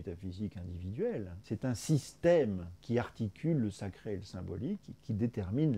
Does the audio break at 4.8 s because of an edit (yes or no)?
no